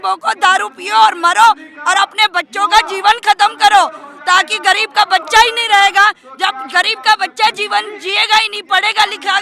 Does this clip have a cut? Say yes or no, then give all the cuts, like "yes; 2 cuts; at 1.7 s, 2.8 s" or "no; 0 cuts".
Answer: no; 0 cuts